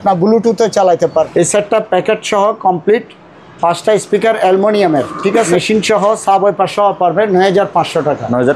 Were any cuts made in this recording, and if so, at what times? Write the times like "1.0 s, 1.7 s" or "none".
1.1 s, 5.5 s